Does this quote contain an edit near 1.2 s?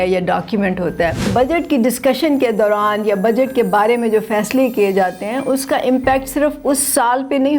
yes; 1 cut; at 1.2 s

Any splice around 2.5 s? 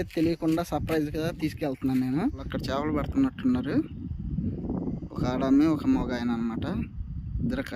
yes; 1 cut; at 2.5 s

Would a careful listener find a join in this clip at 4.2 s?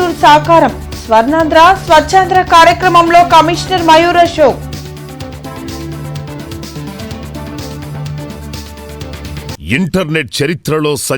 no; 1 cut; at 9.6 s

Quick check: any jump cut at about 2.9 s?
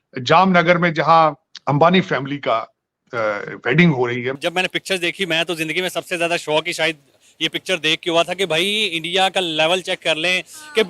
no; 2 cuts; at 1.5 s, 4.4 s

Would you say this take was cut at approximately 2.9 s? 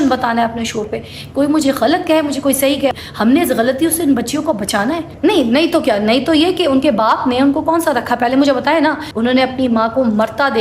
yes; 3 cuts; at 2.9 s, 5.1 s, 9.1 s

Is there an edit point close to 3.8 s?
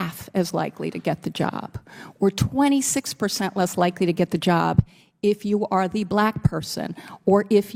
no; 0 cuts

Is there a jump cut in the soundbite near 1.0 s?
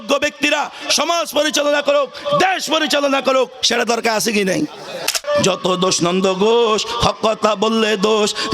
no; 1 cut; at 5.1 s

